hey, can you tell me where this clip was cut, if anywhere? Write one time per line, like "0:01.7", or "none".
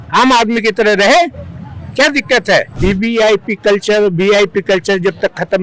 0:02.7